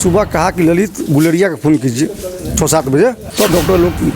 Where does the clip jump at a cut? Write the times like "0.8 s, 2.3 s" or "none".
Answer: 3.2 s